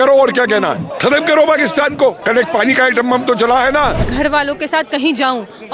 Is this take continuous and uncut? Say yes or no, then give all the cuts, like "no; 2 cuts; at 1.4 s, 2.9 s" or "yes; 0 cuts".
no; 3 cuts; at 0.9 s, 2.2 s, 4.0 s